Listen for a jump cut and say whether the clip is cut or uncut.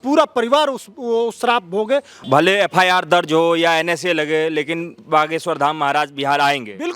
cut